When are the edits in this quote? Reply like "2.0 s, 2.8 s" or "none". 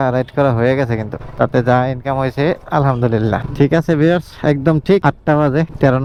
none